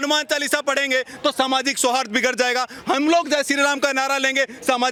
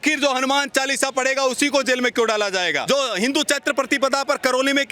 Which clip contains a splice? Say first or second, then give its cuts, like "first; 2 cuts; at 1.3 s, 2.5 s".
second; 1 cut; at 2.8 s